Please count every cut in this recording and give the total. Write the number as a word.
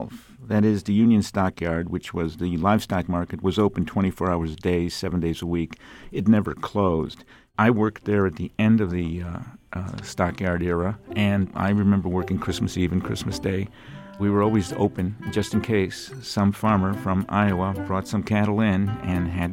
three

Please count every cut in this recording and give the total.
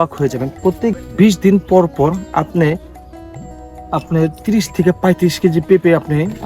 one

